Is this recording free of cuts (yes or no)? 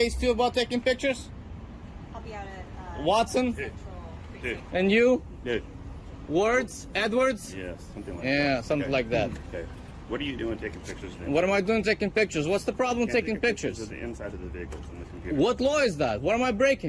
yes